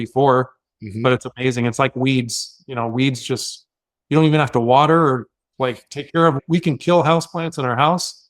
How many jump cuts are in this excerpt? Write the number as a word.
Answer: one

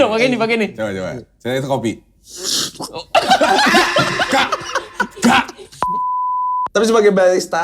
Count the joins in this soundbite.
one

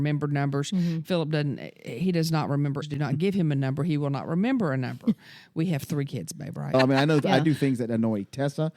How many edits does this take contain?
two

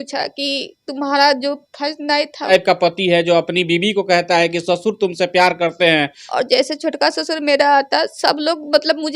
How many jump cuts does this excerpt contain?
two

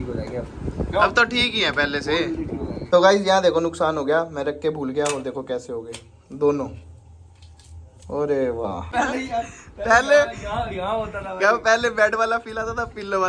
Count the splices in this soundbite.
two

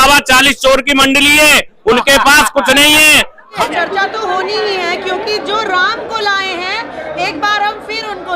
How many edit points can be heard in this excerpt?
one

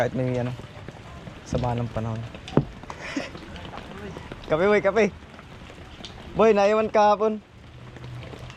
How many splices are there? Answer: zero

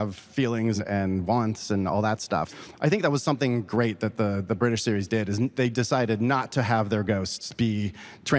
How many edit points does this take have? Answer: two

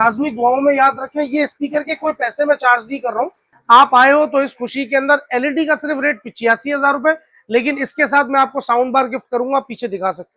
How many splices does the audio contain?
one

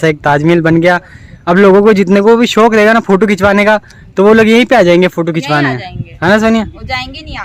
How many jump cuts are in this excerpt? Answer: zero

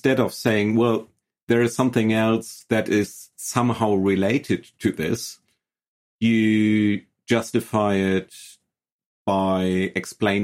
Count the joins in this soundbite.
zero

